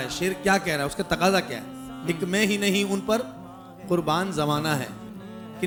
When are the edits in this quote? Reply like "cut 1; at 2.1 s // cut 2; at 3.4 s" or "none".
none